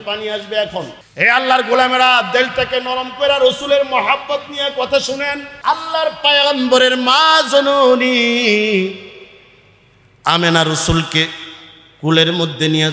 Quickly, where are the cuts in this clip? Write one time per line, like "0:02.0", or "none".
0:01.0
0:05.5